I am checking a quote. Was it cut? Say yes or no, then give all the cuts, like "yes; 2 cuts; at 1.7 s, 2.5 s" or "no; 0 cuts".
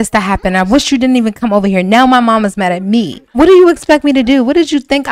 yes; 1 cut; at 3.2 s